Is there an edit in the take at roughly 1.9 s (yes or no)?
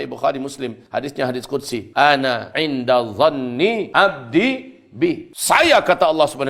yes